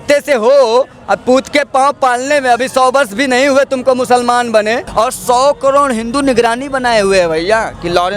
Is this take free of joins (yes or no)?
no